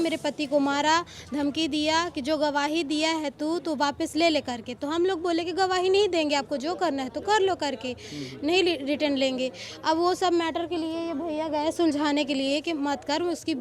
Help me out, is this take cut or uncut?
uncut